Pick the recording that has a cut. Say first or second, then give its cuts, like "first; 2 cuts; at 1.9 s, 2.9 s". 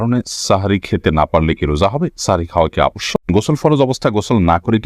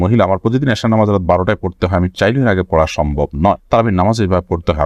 first; 1 cut; at 3.3 s